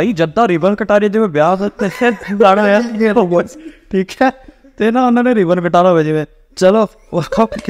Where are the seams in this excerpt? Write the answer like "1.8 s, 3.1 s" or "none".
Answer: none